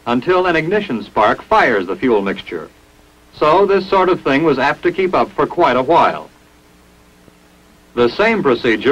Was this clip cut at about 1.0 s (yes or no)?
no